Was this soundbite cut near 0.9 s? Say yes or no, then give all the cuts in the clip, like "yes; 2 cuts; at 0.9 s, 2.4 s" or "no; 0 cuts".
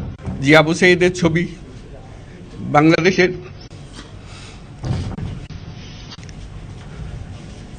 yes; 1 cut; at 0.9 s